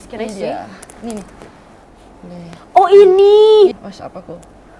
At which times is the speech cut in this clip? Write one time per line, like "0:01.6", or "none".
0:03.7